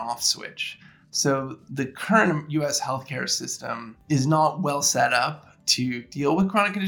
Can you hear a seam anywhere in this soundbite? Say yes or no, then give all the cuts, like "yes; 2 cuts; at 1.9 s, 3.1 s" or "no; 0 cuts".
yes; 2 cuts; at 1.6 s, 3.9 s